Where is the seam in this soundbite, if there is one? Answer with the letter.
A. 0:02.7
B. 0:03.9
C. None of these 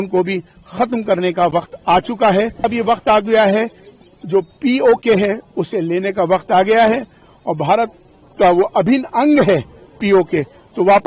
A